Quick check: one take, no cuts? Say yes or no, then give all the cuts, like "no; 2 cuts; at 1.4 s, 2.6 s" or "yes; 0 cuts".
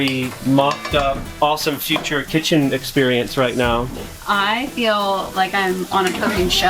no; 1 cut; at 1.3 s